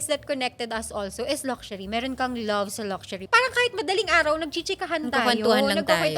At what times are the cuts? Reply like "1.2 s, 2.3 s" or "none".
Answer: 3.2 s